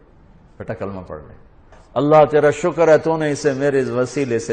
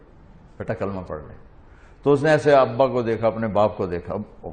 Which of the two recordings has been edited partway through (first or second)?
first